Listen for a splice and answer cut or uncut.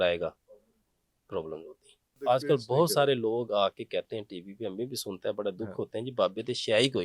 cut